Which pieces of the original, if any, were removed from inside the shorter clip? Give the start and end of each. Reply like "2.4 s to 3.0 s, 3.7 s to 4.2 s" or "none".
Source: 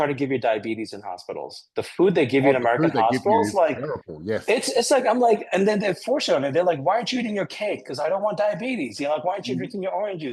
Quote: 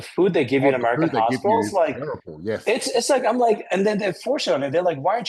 none